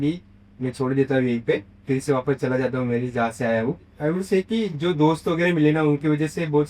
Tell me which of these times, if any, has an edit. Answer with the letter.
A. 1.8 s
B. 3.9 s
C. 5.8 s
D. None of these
B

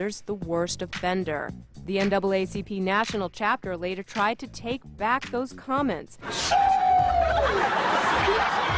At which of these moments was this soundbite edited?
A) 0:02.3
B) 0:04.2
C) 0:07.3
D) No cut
D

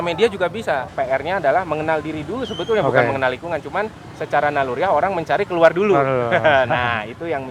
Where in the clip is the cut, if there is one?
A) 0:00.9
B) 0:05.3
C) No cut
A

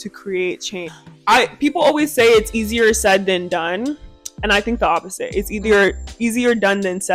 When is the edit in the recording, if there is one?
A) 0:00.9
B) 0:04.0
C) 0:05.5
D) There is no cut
A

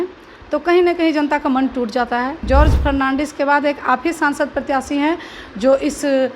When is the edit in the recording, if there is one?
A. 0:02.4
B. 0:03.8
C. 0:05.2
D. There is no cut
A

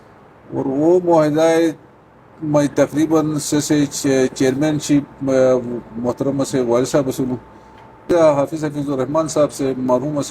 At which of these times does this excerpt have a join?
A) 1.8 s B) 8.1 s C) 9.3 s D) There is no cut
B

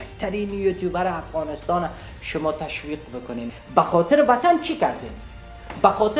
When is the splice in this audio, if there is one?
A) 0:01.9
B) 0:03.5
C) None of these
B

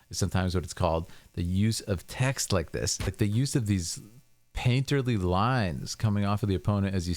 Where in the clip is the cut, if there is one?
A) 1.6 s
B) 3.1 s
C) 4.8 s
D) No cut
B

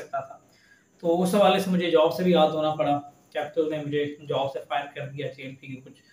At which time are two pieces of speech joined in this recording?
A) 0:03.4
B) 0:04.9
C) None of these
C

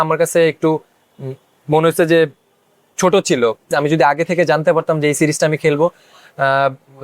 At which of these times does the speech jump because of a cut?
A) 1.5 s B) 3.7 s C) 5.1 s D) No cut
B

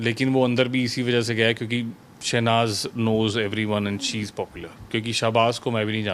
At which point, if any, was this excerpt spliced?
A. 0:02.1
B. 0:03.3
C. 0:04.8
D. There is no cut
D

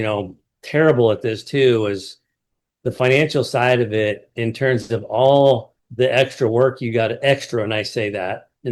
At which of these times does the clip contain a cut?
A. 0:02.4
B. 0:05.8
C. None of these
B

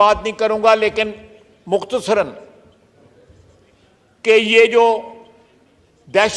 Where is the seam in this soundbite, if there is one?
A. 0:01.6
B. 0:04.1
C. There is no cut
C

